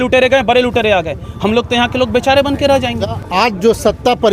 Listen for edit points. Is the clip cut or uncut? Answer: cut